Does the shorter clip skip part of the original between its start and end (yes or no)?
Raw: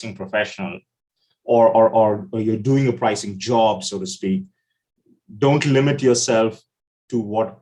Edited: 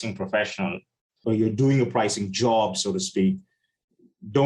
yes